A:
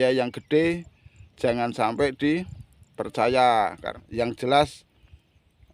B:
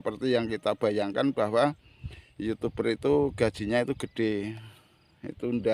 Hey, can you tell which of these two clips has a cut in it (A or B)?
A